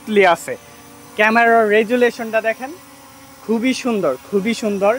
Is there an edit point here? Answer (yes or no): no